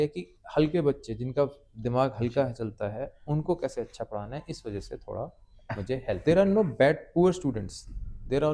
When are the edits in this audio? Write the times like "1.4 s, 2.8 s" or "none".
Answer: 6.2 s